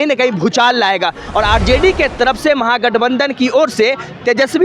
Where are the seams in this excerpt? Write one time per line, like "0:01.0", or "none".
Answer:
0:01.2